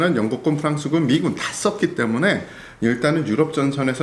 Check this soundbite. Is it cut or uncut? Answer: uncut